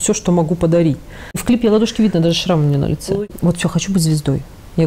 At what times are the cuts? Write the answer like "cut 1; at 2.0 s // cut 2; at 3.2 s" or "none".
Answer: cut 1; at 1.3 s // cut 2; at 3.3 s